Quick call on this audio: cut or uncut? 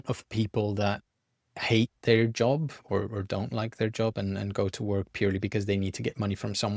uncut